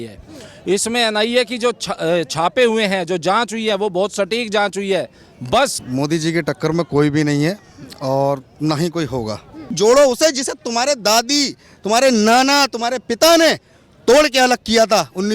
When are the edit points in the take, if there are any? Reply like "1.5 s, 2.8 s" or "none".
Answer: 5.8 s, 9.7 s